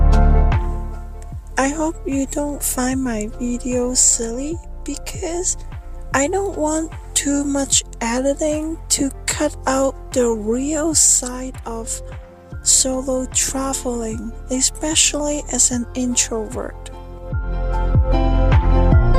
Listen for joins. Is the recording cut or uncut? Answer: uncut